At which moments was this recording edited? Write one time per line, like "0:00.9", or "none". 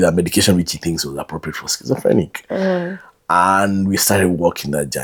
none